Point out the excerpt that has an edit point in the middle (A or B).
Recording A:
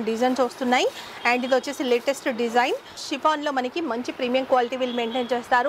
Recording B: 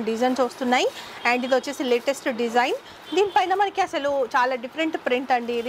A